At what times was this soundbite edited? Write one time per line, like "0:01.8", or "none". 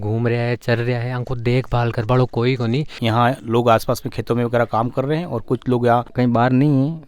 0:03.0
0:06.1